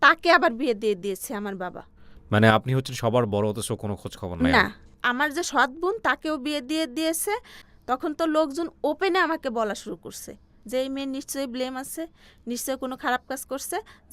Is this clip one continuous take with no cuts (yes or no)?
yes